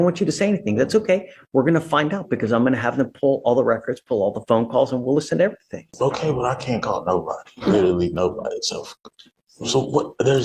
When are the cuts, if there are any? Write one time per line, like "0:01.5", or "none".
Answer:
0:05.9

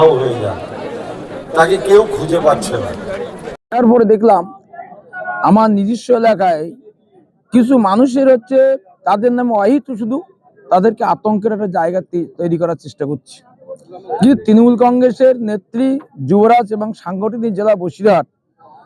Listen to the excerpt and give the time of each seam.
0:03.5

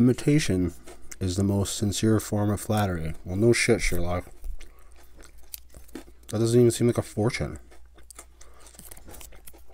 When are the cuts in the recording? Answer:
none

